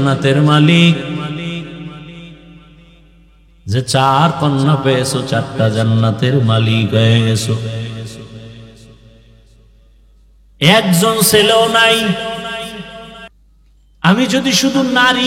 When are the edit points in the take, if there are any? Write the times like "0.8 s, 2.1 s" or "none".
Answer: 13.3 s